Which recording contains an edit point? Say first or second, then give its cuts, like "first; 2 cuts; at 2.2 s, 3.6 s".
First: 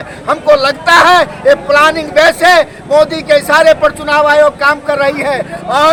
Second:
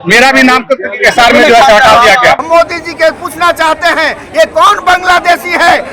second; 1 cut; at 2.4 s